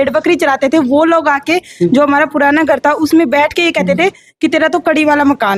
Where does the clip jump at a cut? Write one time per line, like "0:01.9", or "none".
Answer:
none